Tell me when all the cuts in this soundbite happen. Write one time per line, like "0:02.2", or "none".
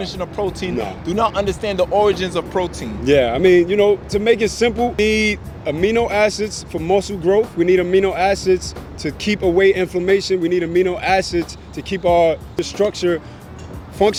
none

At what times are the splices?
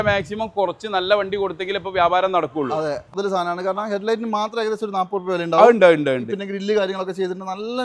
0:03.1

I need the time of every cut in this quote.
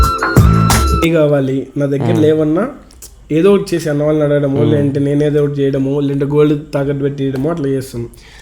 0:01.0

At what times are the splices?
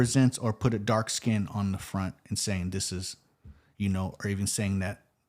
none

